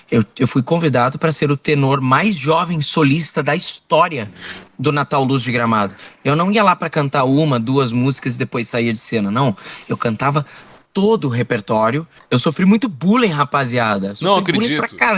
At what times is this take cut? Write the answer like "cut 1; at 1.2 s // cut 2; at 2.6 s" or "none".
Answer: cut 1; at 12.1 s